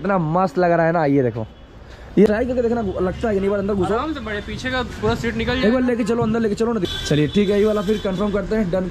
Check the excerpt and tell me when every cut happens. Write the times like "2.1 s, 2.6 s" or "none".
2.3 s, 6.8 s